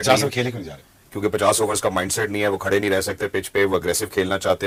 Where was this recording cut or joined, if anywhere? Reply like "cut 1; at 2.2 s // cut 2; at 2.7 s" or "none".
none